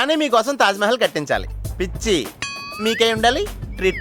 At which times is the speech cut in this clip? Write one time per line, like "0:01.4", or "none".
none